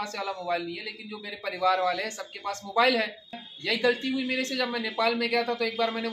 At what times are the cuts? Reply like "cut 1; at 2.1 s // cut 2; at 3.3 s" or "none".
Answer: cut 1; at 3.5 s